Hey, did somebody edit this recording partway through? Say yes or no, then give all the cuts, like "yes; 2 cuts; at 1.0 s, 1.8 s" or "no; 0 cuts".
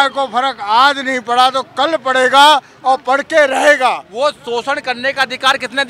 yes; 1 cut; at 4.1 s